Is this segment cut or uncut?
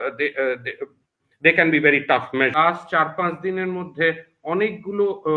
cut